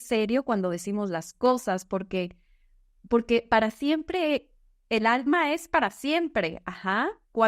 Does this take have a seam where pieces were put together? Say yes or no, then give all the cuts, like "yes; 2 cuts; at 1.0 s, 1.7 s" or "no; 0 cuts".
no; 0 cuts